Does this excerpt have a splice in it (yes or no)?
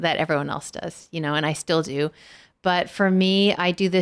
no